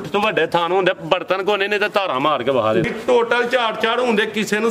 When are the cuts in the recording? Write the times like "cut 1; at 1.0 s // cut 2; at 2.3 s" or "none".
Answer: cut 1; at 2.9 s